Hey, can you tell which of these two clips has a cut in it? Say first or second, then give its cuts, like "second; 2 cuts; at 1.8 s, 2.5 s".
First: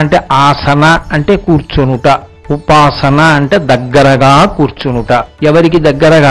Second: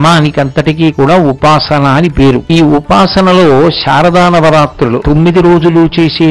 second; 2 cuts; at 2.4 s, 5.0 s